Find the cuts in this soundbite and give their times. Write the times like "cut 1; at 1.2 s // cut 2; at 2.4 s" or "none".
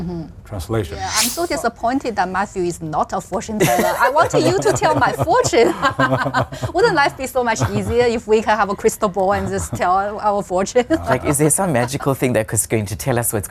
cut 1; at 1.0 s